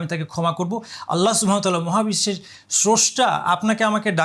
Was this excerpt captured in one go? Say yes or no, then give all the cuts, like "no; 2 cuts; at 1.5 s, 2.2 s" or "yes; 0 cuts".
yes; 0 cuts